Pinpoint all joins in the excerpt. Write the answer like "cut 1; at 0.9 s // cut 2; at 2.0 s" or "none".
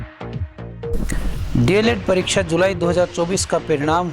cut 1; at 1.0 s